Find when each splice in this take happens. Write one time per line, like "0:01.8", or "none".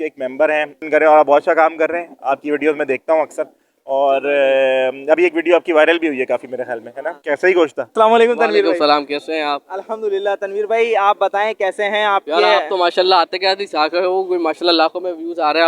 0:00.8
0:07.8